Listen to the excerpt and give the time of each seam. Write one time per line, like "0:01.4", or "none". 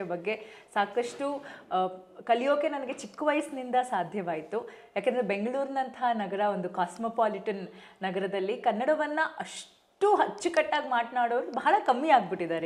none